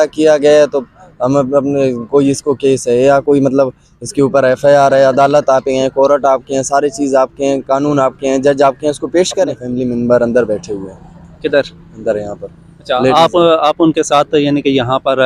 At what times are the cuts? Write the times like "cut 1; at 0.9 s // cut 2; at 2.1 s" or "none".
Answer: cut 1; at 9.6 s